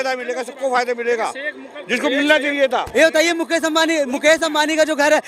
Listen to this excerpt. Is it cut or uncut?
cut